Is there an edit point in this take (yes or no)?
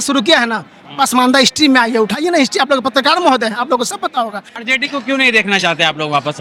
yes